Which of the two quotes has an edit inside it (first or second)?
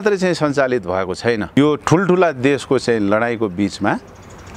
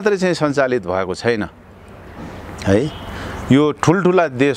first